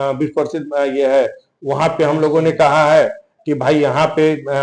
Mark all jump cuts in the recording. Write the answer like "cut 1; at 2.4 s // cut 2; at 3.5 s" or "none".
none